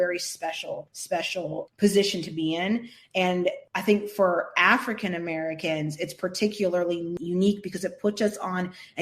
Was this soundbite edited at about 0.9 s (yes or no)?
yes